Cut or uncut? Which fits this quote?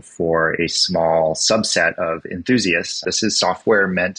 cut